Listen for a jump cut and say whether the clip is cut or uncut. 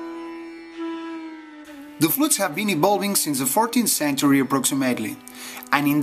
uncut